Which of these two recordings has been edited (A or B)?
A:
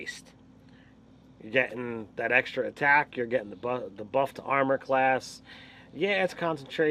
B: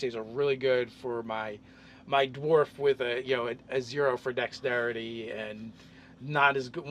A